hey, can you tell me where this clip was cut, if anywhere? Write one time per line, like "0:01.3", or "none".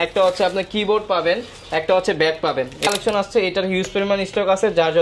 0:02.9